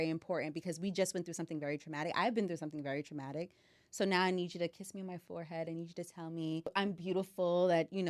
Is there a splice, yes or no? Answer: yes